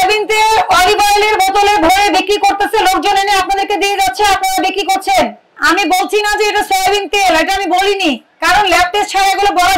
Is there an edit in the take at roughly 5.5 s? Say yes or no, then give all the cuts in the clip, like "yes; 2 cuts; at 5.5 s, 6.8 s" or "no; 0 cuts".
yes; 1 cut; at 5.5 s